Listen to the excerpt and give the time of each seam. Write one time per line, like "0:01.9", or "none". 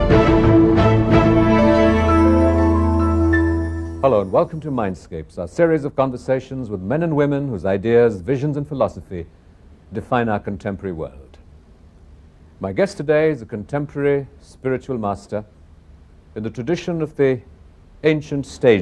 0:07.5